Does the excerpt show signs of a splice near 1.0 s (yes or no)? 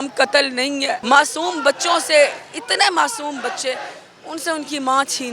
yes